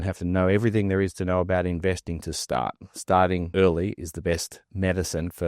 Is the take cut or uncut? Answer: cut